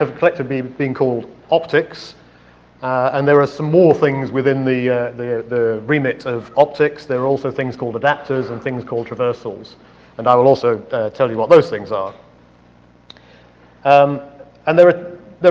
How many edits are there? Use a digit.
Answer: 1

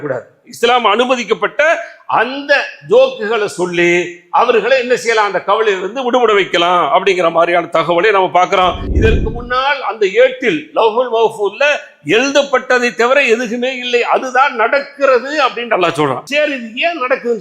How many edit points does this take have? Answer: 2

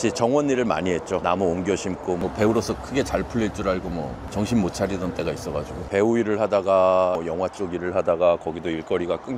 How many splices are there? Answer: 3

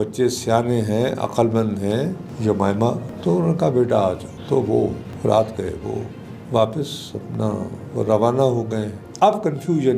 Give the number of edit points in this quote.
3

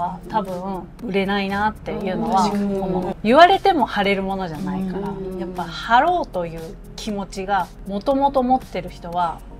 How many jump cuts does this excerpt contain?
3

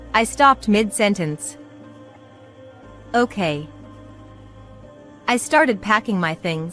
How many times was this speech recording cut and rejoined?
2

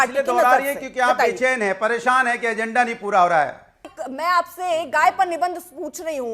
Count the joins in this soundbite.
1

